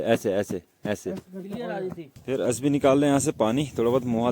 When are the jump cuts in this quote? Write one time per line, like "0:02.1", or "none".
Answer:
0:02.0